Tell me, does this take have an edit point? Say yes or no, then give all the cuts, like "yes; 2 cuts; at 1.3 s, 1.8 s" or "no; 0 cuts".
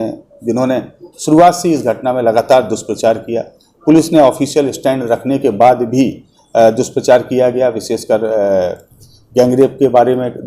no; 0 cuts